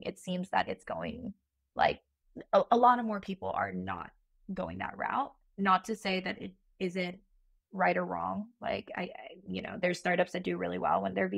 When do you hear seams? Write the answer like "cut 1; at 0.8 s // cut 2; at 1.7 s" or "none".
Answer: cut 1; at 5.4 s

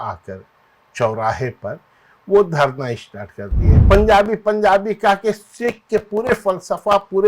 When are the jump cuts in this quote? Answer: cut 1; at 3.7 s

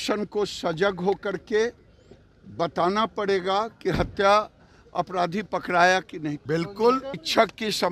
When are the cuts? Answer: cut 1; at 6.4 s

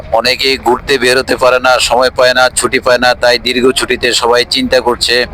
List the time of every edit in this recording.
none

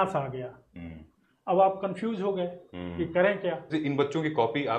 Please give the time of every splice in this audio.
cut 1; at 3.7 s

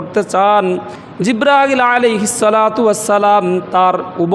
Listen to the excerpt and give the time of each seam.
cut 1; at 0.9 s

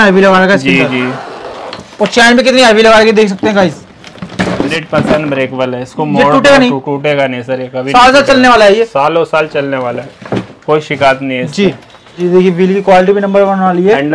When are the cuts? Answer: cut 1; at 4.7 s // cut 2; at 12.2 s

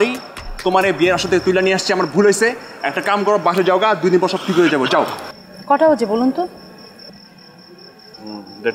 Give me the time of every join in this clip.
cut 1; at 5.2 s

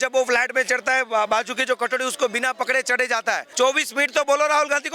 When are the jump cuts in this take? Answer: cut 1; at 3.5 s

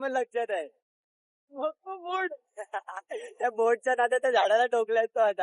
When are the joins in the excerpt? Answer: none

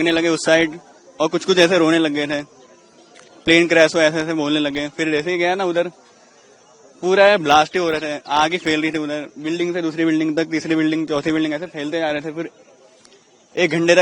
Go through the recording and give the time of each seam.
none

